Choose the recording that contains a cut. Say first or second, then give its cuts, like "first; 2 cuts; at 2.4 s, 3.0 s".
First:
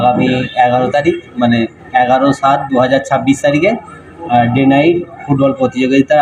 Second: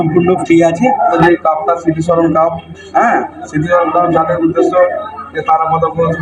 second; 1 cut; at 1.2 s